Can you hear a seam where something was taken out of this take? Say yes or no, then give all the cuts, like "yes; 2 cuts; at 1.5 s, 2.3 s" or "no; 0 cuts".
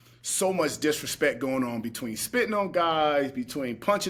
no; 0 cuts